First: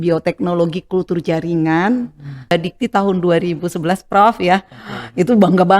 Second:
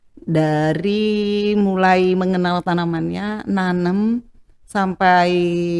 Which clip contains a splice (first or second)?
first